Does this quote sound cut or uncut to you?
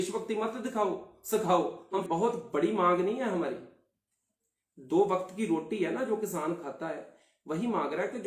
cut